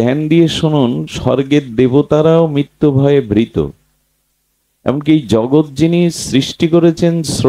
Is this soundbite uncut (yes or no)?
yes